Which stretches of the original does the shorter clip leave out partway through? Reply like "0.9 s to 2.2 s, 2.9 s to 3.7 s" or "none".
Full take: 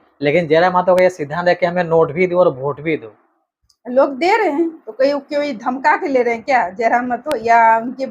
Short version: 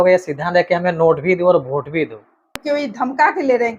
3.5 s to 5.2 s